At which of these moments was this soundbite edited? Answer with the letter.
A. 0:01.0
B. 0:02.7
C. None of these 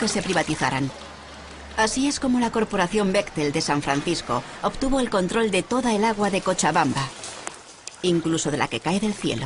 B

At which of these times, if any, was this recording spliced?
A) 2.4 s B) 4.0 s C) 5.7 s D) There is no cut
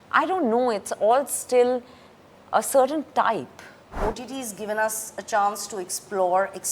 B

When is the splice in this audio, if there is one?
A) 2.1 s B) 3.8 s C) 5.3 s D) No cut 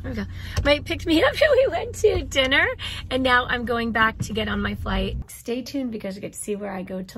C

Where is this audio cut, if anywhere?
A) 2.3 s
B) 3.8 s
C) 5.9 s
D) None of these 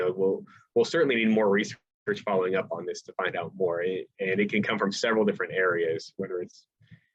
D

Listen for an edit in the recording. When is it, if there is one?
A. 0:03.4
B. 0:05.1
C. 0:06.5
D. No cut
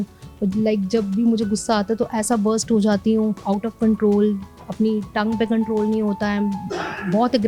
A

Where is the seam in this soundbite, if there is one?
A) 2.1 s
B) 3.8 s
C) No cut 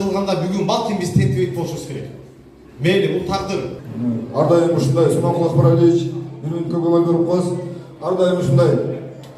B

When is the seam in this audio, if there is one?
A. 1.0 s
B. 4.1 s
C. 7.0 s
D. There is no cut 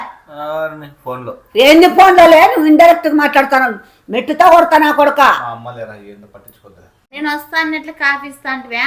C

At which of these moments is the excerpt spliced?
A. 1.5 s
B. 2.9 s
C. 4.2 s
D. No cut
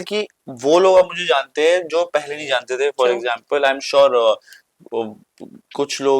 D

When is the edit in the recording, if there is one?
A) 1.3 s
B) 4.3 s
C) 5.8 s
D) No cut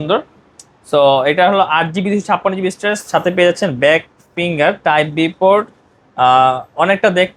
D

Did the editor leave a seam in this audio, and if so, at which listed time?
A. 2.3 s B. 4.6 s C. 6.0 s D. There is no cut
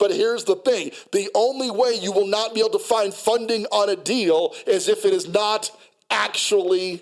D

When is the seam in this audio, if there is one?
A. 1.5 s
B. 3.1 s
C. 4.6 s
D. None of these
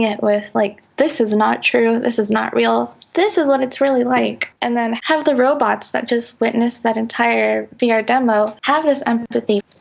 C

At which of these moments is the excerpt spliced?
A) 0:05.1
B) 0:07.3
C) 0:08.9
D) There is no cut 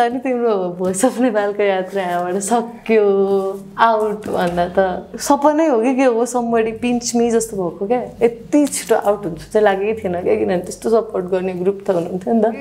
A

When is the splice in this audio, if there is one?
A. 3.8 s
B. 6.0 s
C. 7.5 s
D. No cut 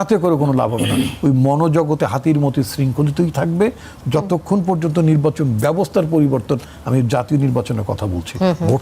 D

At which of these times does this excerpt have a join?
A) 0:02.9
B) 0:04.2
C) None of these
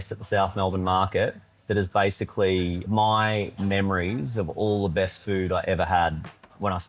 A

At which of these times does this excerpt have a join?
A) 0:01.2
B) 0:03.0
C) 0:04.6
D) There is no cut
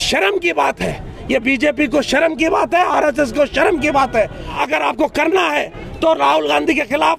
C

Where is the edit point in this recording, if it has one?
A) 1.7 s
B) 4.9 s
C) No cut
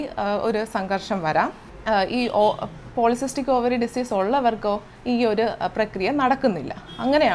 A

